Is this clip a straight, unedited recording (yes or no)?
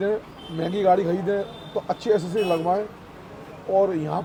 yes